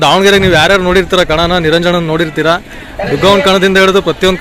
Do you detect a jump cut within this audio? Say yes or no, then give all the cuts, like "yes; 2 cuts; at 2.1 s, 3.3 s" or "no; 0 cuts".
no; 0 cuts